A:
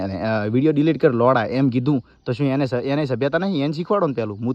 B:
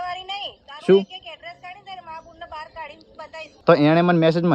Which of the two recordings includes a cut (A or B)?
B